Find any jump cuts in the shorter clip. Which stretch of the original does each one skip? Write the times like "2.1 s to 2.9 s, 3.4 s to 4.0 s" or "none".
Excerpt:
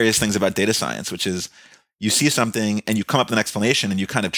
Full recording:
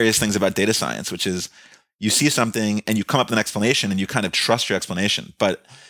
none